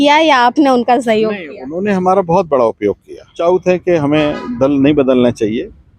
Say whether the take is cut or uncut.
cut